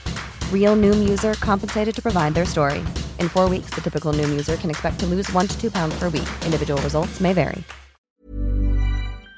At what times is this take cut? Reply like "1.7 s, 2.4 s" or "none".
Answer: 8.0 s